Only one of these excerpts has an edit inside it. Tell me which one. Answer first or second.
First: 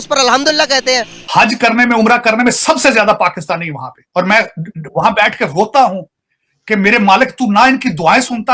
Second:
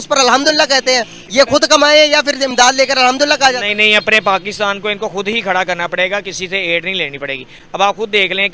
first